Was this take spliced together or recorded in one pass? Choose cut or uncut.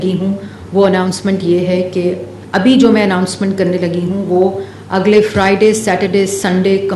cut